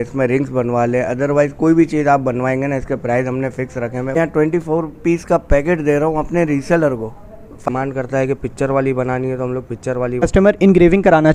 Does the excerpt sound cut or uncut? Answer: cut